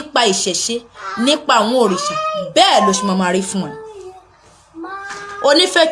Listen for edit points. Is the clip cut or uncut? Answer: uncut